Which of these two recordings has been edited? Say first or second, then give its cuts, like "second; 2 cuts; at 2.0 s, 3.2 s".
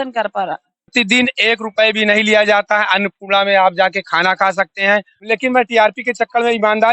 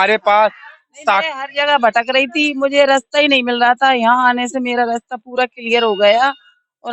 first; 2 cuts; at 0.9 s, 5.1 s